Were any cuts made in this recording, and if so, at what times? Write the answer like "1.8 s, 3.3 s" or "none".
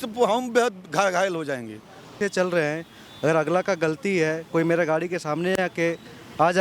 2.2 s

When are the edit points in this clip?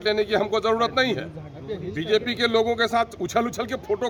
none

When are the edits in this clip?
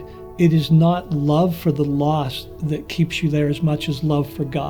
none

